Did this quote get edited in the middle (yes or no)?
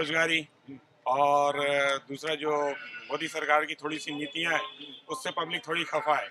no